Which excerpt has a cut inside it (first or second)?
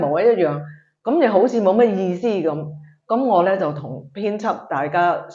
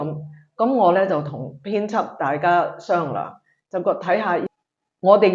second